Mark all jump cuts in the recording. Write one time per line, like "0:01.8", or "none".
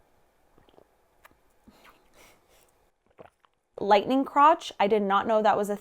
0:03.8